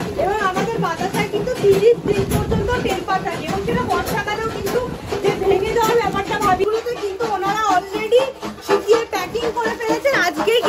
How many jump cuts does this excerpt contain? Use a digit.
1